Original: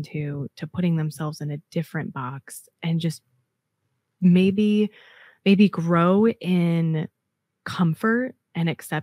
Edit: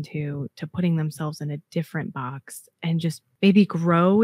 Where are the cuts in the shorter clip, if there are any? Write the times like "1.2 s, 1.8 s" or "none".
3.2 s

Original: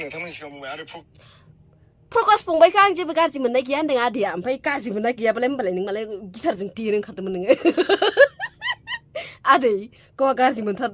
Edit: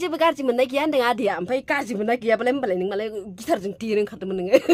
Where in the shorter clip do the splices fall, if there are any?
none

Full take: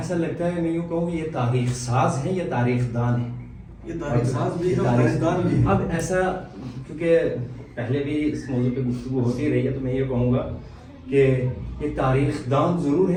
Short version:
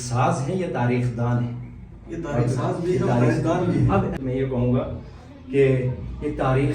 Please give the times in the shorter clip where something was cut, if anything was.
4.2 s

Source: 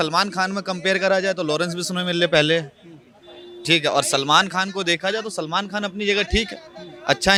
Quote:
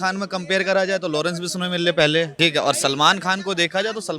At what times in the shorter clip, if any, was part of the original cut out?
2.3 s

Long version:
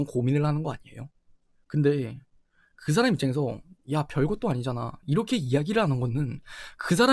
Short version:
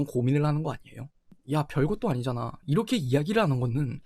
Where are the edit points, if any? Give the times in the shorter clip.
1.3 s

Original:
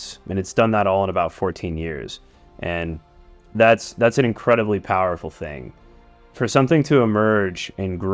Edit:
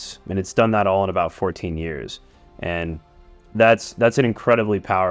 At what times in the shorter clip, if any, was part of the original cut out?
none

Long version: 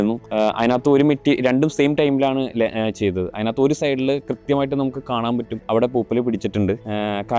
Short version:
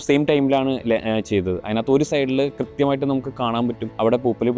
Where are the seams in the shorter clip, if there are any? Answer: none

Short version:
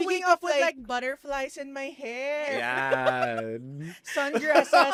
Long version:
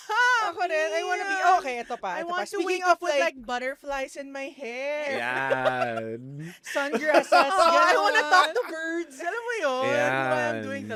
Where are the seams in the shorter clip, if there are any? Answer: none

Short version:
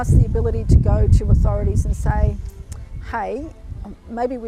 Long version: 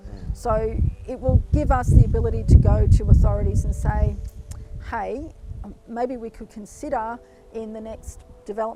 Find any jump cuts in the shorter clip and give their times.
none

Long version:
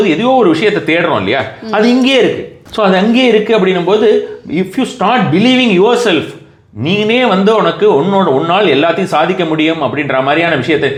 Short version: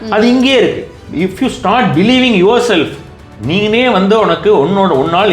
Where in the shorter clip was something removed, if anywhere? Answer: 1.0 s

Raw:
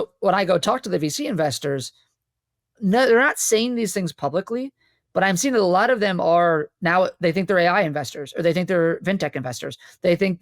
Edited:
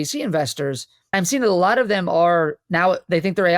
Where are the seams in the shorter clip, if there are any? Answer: 1.1 s

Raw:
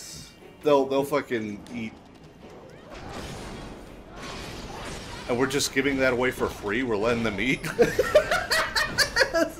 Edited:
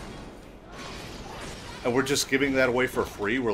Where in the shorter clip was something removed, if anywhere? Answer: none

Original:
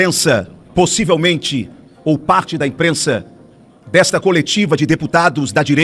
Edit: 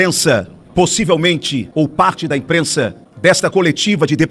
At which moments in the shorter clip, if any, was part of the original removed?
1.6 s, 3.0 s

